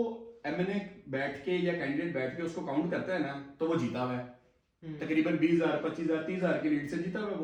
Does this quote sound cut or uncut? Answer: uncut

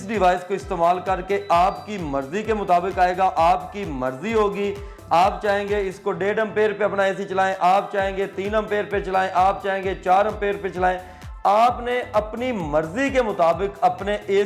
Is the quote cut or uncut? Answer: uncut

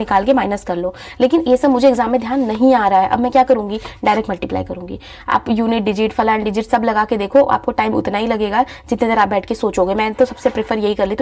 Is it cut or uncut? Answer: uncut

